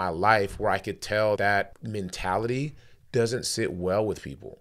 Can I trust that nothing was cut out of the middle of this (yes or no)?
no